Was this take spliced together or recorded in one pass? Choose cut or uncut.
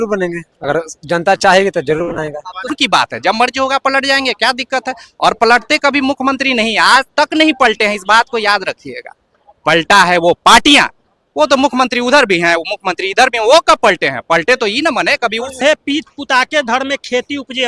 cut